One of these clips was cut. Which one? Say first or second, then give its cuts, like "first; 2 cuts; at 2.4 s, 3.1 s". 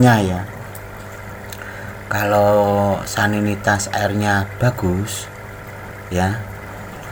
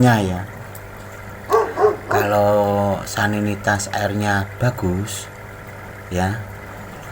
second; 2 cuts; at 1.3 s, 2.2 s